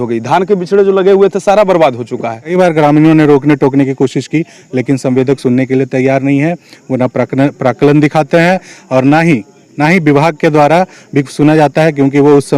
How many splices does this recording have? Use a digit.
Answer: 1